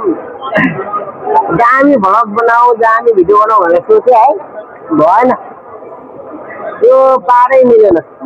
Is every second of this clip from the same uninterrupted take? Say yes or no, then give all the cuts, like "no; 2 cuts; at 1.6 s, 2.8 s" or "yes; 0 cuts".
yes; 0 cuts